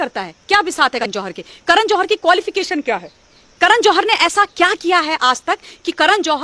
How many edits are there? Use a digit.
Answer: 1